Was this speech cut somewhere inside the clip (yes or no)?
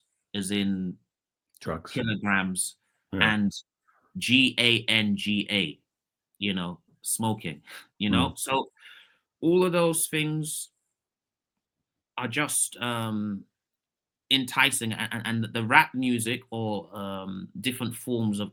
no